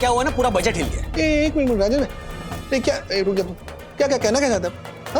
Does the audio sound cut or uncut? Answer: cut